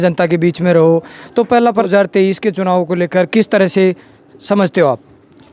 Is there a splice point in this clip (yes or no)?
yes